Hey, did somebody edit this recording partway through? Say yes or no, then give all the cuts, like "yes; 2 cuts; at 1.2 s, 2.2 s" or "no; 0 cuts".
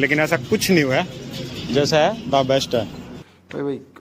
yes; 1 cut; at 3.0 s